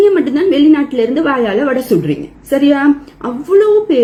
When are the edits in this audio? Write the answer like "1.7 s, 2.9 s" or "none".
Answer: none